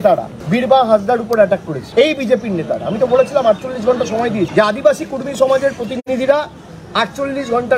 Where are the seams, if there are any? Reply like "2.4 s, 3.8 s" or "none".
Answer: none